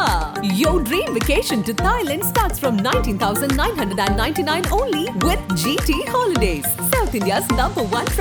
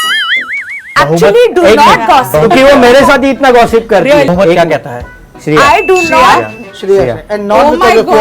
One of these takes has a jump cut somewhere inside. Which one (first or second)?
second